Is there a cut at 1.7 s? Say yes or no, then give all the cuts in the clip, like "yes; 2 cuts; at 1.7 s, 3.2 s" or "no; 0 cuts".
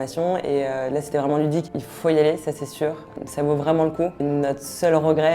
yes; 3 cuts; at 1.7 s, 3.1 s, 4.2 s